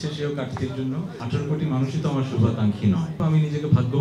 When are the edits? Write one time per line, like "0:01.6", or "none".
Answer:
0:01.2
0:03.1